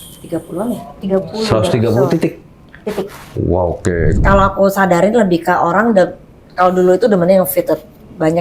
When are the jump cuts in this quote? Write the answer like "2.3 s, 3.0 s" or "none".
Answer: 4.1 s